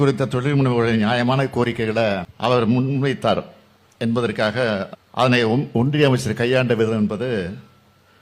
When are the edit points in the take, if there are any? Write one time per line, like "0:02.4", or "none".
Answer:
0:02.3
0:05.0